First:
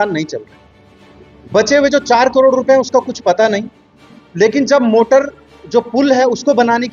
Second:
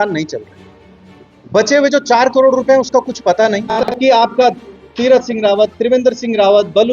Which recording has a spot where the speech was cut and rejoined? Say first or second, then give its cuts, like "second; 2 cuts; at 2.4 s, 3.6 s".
second; 1 cut; at 4.0 s